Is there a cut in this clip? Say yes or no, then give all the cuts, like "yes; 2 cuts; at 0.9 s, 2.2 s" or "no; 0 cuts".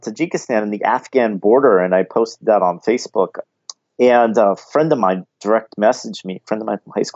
yes; 1 cut; at 3.4 s